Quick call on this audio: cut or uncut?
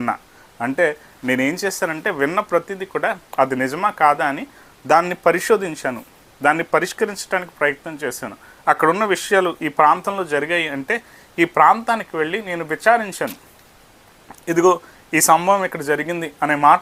uncut